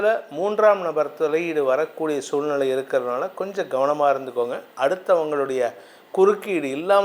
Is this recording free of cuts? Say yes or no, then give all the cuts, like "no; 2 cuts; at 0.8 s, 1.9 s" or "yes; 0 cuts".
yes; 0 cuts